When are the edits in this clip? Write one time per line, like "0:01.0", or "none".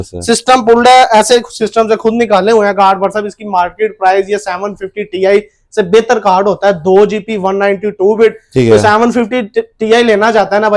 none